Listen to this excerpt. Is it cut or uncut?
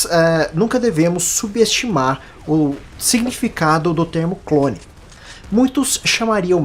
uncut